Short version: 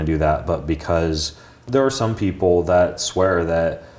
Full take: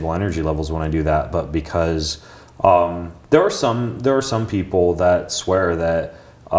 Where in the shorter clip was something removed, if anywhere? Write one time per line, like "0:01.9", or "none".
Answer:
0:01.6